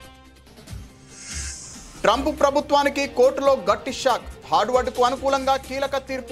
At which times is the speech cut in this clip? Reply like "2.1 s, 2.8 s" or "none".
1.6 s